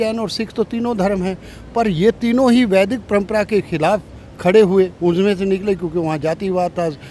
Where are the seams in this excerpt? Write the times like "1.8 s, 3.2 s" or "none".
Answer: none